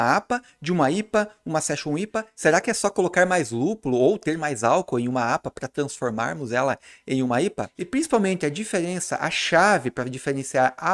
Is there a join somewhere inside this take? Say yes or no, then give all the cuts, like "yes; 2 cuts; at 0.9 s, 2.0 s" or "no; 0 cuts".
yes; 2 cuts; at 2.2 s, 7.8 s